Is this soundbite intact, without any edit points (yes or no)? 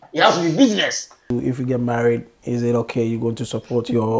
no